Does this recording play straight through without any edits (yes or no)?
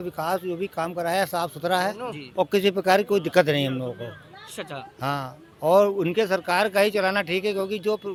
yes